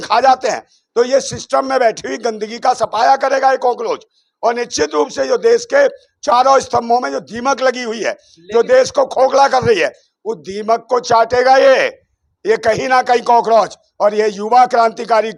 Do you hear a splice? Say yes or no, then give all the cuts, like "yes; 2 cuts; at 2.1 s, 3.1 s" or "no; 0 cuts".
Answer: no; 0 cuts